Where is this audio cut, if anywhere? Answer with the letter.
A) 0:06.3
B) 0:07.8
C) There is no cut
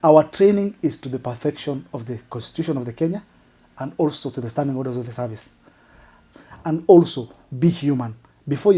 A